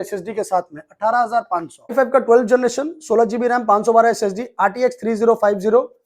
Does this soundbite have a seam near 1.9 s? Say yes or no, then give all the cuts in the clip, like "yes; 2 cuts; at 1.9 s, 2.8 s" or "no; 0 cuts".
yes; 1 cut; at 1.9 s